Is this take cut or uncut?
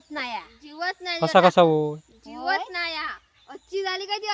uncut